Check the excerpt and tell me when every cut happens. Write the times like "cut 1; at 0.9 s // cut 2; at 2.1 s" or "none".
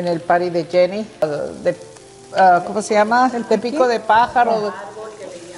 cut 1; at 1.2 s